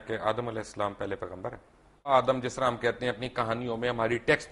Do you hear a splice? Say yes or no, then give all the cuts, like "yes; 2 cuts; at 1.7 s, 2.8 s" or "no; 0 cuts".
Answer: yes; 1 cut; at 2.1 s